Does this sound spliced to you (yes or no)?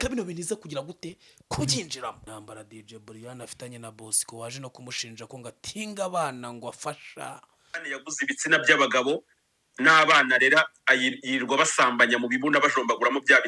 yes